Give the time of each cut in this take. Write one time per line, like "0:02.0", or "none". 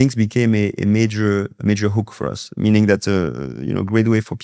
none

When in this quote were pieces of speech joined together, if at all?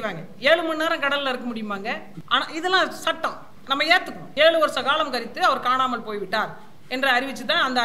0:02.1
0:03.8

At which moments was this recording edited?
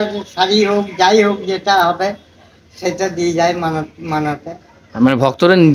none

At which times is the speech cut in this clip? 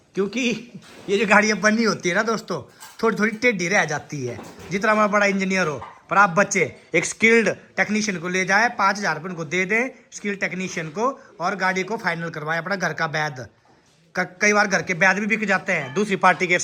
none

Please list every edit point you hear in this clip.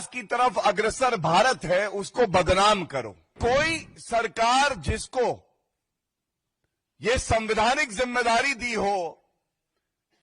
0:03.3

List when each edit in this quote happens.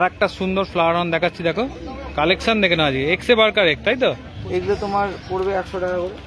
0:04.3

